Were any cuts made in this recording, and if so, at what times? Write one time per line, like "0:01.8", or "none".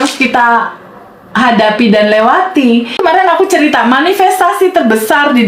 0:03.0